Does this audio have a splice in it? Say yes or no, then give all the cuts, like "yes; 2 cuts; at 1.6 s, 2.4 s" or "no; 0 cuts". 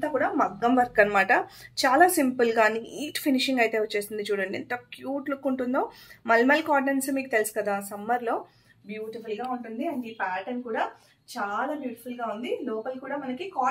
no; 0 cuts